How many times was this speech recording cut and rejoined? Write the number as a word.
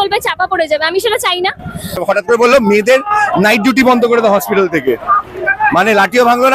one